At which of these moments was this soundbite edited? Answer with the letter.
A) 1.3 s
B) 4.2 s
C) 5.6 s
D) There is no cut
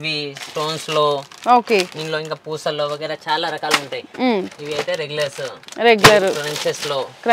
D